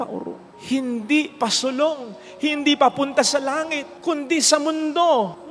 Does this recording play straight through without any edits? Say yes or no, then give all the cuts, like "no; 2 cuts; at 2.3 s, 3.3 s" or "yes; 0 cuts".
yes; 0 cuts